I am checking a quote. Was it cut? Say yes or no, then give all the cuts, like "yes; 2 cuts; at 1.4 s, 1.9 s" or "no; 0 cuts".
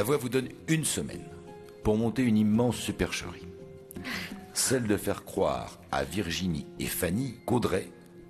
no; 0 cuts